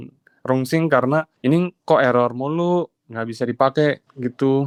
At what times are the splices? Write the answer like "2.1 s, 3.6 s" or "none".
none